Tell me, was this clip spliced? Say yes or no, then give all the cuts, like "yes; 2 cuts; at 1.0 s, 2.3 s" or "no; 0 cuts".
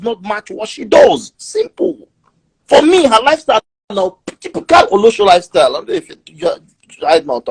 no; 0 cuts